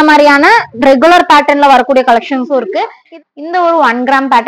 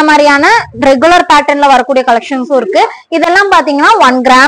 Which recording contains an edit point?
first; 1 cut; at 2.9 s

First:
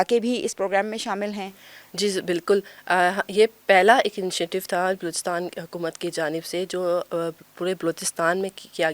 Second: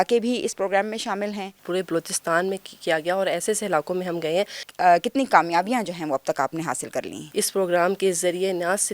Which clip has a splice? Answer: second; 3 cuts; at 1.5 s, 4.7 s, 7.2 s

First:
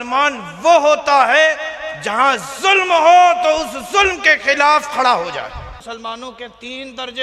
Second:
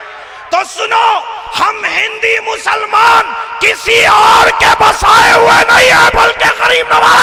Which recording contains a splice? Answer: first; 1 cut; at 5.8 s

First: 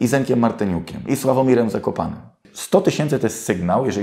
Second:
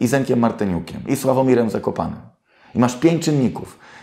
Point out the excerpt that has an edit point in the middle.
first; 1 cut; at 2.5 s

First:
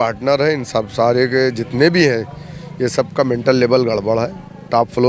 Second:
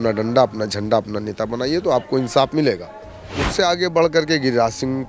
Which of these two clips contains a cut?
second; 1 cut; at 3.4 s

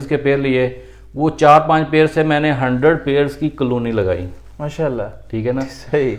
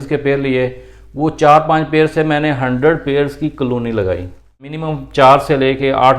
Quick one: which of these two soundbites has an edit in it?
second; 1 cut; at 4.7 s

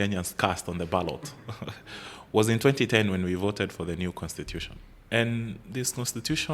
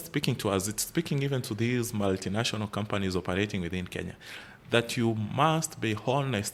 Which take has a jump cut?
first; 1 cut; at 5.0 s

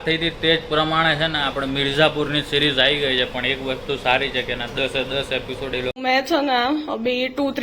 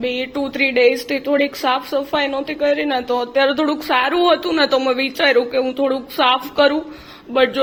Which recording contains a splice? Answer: first; 1 cut; at 5.9 s

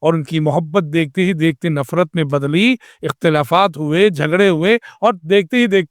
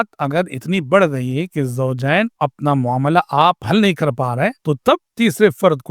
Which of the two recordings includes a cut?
second; 2 cuts; at 2.3 s, 4.6 s

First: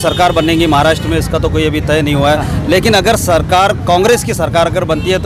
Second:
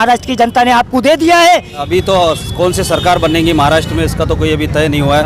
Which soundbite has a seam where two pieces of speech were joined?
second; 1 cut; at 1.8 s

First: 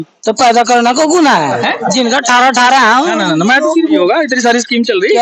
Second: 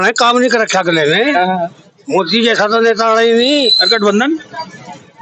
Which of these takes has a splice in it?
first; 1 cut; at 4.0 s

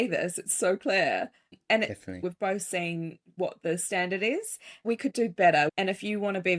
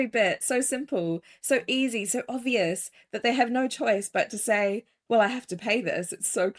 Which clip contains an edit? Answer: first; 3 cuts; at 2.2 s, 4.7 s, 5.7 s

